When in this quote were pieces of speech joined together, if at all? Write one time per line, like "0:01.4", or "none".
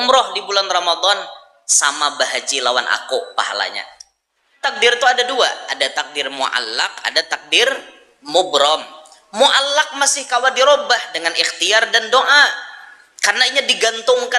0:04.6